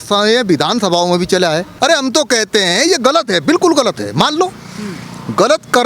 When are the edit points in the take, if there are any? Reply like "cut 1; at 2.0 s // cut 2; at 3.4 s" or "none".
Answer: cut 1; at 1.7 s